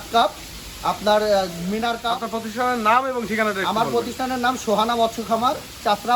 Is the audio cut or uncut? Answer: cut